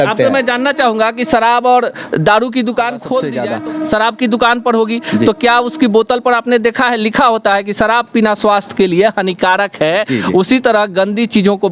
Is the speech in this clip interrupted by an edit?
yes; 1 cut; at 3.4 s

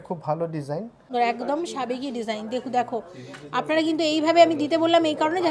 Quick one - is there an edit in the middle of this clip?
yes; 1 cut; at 1.1 s

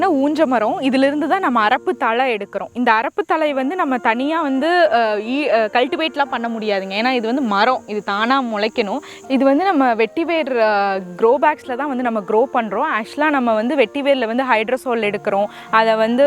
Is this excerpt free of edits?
no; 1 cut; at 9.1 s

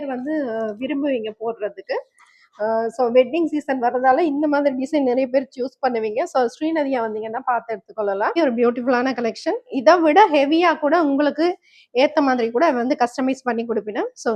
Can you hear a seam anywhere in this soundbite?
yes; 1 cut; at 8.4 s

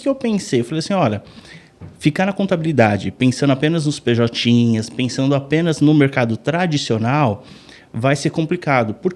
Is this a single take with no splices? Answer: yes; 0 cuts

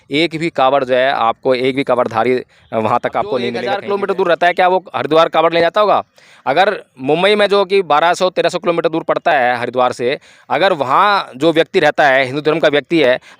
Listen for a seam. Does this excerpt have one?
yes; 1 cut; at 3.7 s

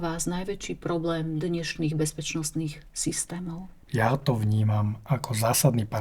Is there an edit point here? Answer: yes; 1 cut; at 3.8 s

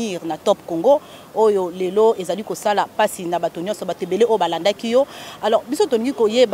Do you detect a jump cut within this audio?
no; 0 cuts

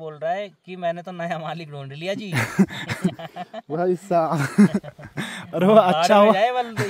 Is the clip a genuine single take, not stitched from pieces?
yes; 0 cuts

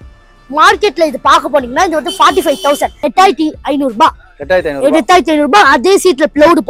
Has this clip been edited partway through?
yes; 1 cut; at 3.0 s

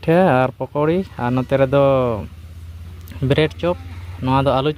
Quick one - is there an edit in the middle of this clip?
no; 0 cuts

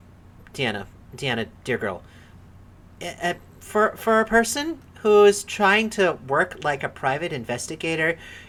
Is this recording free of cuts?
yes; 0 cuts

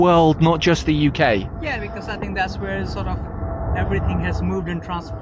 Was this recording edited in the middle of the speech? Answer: no; 0 cuts

